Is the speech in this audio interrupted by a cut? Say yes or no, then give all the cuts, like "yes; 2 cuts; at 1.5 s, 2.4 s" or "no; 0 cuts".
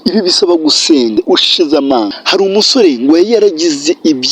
yes; 2 cuts; at 1.1 s, 2.2 s